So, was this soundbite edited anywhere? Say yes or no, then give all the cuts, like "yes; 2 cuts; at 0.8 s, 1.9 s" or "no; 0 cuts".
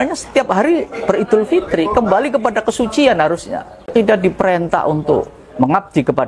yes; 1 cut; at 3.9 s